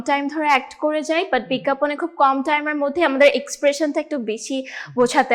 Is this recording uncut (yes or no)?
yes